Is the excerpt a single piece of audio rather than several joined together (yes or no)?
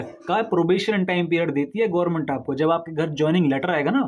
yes